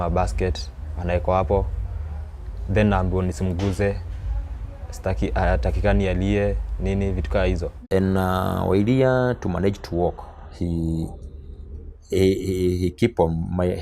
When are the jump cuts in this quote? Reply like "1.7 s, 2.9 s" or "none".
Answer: none